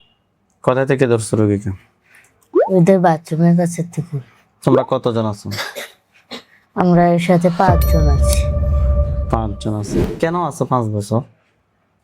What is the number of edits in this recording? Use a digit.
1